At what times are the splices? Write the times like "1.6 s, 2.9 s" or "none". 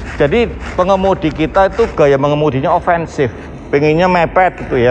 none